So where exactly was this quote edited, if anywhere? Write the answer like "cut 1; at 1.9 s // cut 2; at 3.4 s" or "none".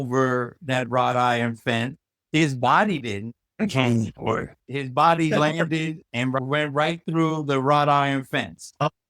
cut 1; at 4.6 s